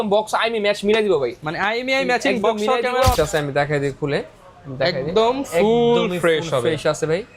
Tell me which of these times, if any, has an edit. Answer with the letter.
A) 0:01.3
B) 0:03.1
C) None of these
B